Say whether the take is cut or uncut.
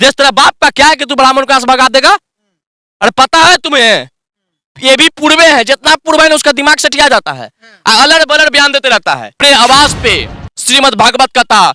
cut